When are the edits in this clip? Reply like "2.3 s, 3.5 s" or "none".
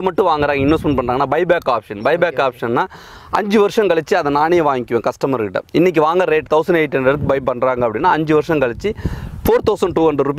none